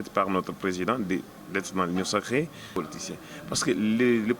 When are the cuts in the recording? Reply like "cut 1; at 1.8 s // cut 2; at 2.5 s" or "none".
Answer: cut 1; at 2.7 s